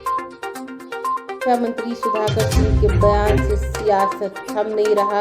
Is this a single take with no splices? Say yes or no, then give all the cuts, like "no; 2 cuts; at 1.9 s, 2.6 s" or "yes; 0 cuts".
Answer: no; 1 cut; at 1.1 s